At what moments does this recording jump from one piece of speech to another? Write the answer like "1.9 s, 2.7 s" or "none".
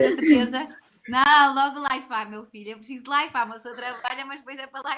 none